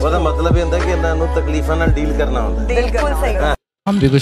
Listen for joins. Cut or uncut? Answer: uncut